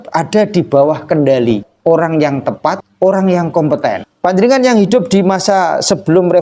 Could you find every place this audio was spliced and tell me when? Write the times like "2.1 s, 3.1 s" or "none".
1.7 s, 2.9 s, 4.1 s